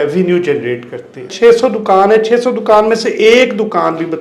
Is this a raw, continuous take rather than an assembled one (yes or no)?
no